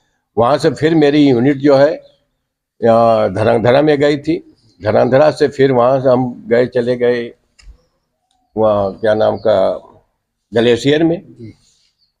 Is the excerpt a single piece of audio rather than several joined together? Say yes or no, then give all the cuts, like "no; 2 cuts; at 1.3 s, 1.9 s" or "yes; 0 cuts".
yes; 0 cuts